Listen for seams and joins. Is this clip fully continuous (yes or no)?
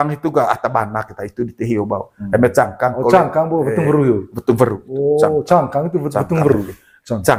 yes